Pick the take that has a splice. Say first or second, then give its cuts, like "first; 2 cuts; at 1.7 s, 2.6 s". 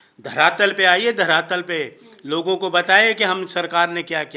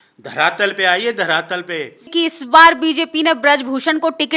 second; 1 cut; at 2.1 s